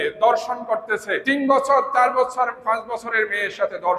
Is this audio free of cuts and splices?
no; 1 cut; at 1.1 s

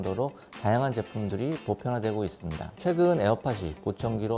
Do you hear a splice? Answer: yes; 1 cut; at 2.7 s

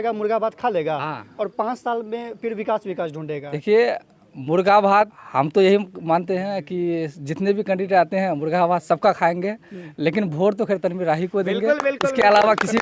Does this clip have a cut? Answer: yes; 2 cuts; at 3.5 s, 5.2 s

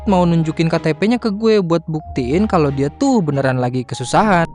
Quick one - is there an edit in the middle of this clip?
no; 0 cuts

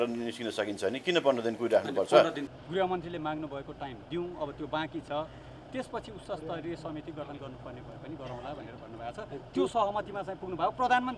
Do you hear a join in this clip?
yes; 1 cut; at 2.5 s

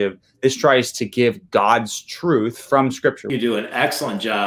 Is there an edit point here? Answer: yes; 1 cut; at 3.3 s

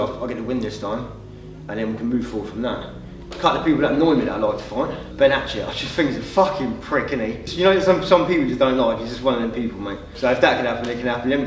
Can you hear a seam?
yes; 4 cuts; at 3.3 s, 5.0 s, 7.4 s, 10.1 s

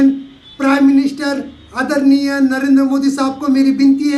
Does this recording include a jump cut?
no; 0 cuts

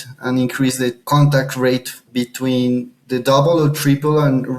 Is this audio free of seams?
no; 3 cuts; at 1.0 s, 2.1 s, 3.0 s

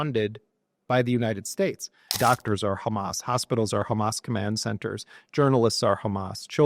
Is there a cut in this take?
yes; 1 cut; at 2.2 s

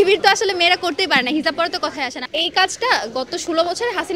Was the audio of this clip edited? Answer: yes; 1 cut; at 2.3 s

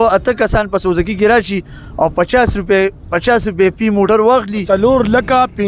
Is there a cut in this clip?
yes; 1 cut; at 4.6 s

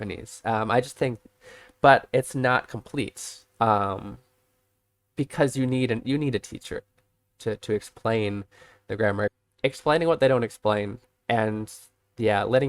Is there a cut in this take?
yes; 1 cut; at 9.4 s

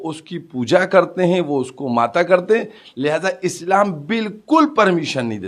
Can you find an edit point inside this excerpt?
no; 0 cuts

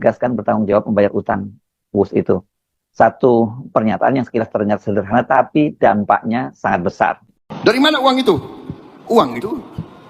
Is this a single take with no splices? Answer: no; 1 cut; at 7.3 s

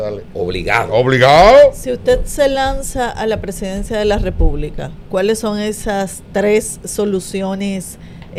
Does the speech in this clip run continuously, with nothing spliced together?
yes; 0 cuts

